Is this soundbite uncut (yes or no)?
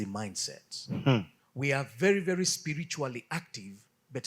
no